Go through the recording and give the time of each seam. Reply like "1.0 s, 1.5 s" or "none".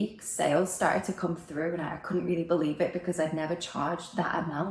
none